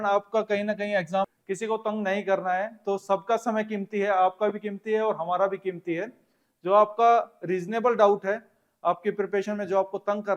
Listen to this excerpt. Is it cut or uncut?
cut